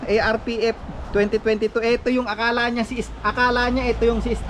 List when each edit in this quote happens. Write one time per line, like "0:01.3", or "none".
none